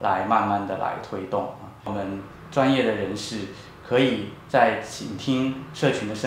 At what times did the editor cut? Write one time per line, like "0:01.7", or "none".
0:01.7